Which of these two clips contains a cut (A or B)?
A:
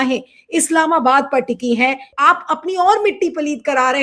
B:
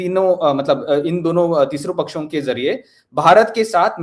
A